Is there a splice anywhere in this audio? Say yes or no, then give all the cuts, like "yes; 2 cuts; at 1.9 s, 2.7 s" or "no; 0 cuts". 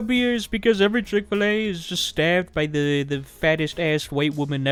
no; 0 cuts